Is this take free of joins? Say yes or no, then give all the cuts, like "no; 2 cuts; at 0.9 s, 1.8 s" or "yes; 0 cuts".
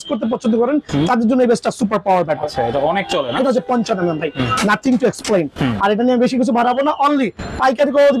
yes; 0 cuts